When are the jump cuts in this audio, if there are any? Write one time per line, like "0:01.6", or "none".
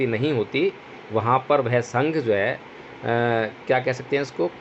none